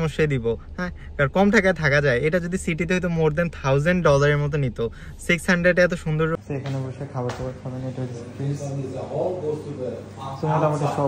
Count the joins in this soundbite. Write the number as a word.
one